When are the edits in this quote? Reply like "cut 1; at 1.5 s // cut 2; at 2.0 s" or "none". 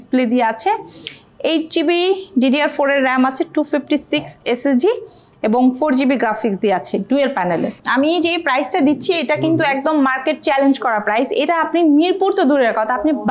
cut 1; at 7.8 s

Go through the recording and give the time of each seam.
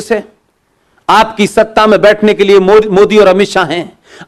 none

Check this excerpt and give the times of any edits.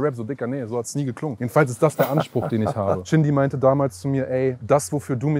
cut 1; at 1.4 s // cut 2; at 3.0 s // cut 3; at 4.6 s

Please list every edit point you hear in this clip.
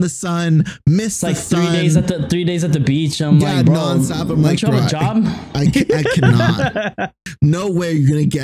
cut 1; at 7.2 s

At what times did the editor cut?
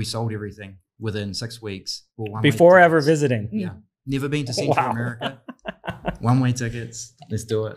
none

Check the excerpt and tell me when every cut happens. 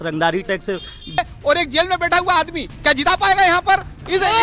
cut 1; at 1.2 s

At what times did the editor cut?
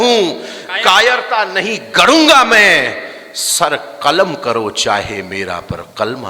none

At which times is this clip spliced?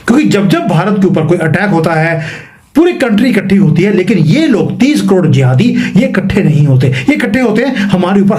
none

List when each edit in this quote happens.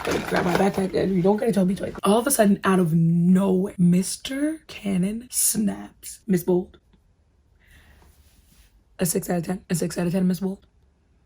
cut 1; at 2.0 s // cut 2; at 6.1 s

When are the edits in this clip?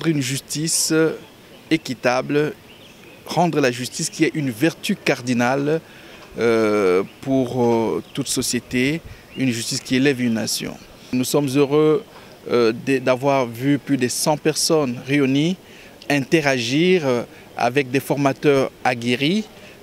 cut 1; at 11.1 s

